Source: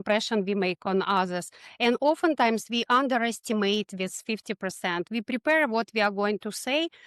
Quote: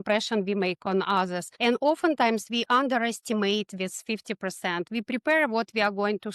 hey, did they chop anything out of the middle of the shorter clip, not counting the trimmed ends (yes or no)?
yes